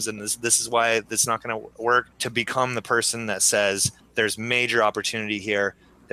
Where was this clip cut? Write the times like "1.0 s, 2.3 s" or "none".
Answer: 2.2 s, 4.0 s

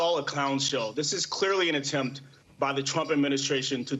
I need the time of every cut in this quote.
none

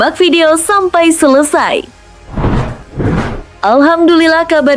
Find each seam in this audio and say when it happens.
2.1 s, 3.4 s

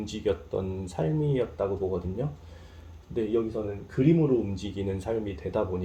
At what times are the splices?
none

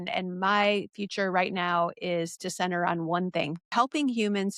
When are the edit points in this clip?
3.7 s

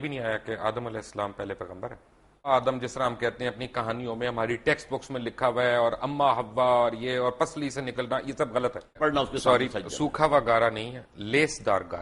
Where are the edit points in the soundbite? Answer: 2.5 s, 9.0 s

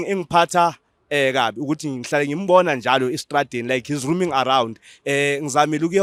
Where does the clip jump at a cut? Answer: none

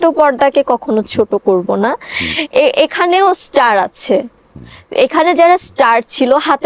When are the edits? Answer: none

